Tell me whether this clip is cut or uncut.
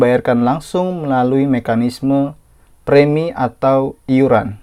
uncut